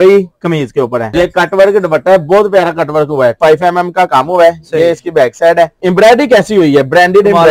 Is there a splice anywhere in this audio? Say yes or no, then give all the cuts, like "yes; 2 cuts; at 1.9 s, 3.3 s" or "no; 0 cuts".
yes; 3 cuts; at 1.1 s, 3.4 s, 5.8 s